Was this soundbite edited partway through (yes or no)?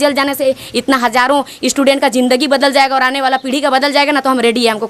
no